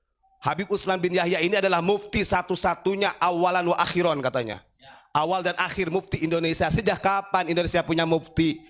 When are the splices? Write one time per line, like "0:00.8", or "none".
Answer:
none